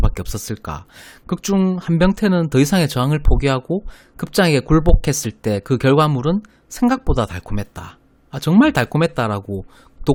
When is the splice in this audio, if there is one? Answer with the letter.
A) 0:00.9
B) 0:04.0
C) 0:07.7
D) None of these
D